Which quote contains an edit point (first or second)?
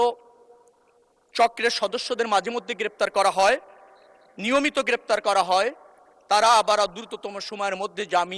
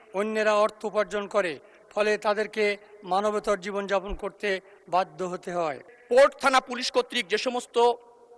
second